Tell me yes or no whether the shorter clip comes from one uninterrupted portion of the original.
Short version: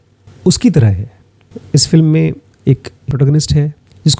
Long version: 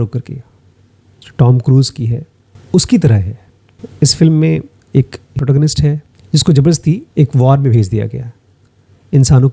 yes